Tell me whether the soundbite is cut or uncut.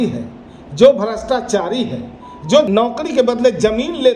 cut